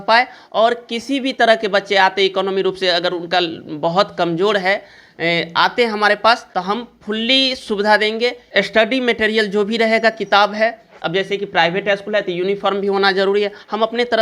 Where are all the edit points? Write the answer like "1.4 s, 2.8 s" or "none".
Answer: 6.4 s, 8.4 s